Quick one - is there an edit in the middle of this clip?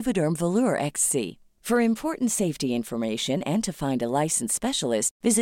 no; 0 cuts

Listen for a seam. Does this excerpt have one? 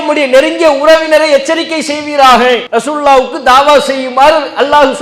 yes; 1 cut; at 2.6 s

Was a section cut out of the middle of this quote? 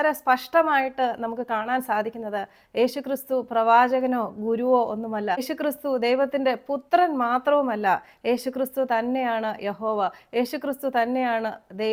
no; 0 cuts

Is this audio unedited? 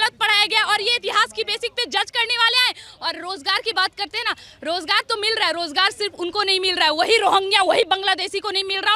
yes; 0 cuts

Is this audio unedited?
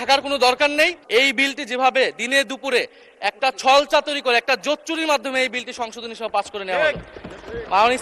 no; 1 cut; at 1.0 s

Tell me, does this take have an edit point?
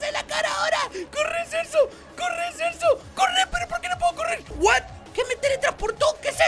yes; 1 cut; at 4.5 s

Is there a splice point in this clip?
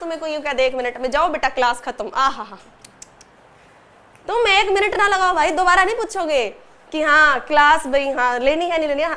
no; 0 cuts

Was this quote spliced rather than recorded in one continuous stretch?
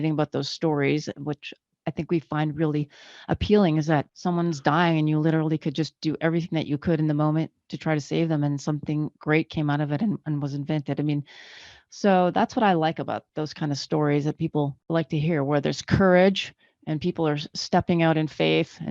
yes; 3 cuts; at 4.1 s, 13.3 s, 14.8 s

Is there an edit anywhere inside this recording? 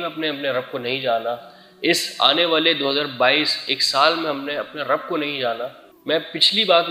no; 0 cuts

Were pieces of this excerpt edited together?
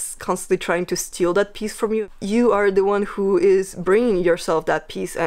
yes; 1 cut; at 2.0 s

